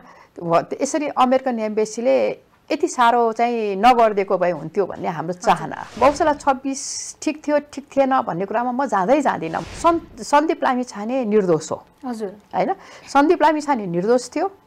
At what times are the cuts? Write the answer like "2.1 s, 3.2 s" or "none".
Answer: 6.0 s, 9.6 s